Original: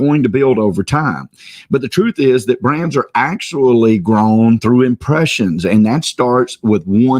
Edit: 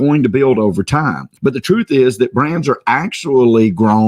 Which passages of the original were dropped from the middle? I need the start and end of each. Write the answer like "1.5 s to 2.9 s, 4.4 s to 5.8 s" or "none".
1.2 s to 1.5 s